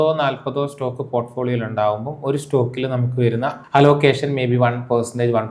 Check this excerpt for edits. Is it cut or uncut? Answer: cut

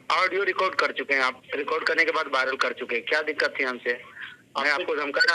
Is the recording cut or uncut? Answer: uncut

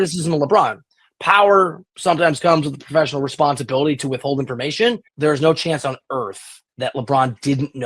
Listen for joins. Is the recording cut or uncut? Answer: cut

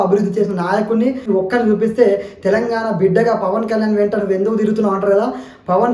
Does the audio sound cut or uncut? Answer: cut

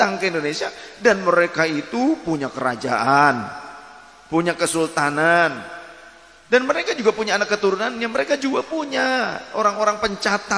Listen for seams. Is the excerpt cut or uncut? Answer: uncut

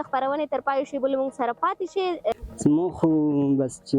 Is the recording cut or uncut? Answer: cut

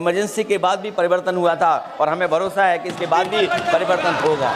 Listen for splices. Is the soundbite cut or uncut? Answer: uncut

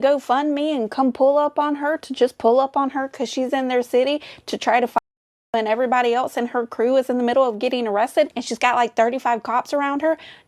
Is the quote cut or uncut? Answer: uncut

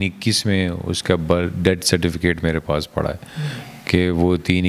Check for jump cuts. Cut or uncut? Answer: uncut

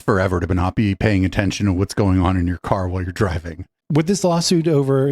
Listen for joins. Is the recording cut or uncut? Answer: cut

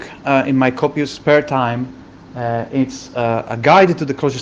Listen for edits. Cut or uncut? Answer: cut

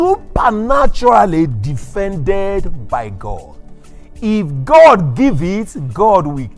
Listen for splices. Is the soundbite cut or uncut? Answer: uncut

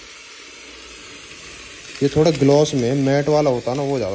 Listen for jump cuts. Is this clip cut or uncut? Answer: uncut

